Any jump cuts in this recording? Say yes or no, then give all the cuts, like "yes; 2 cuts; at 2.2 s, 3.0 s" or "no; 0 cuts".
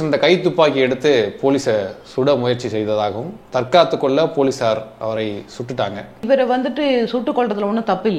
yes; 1 cut; at 6.2 s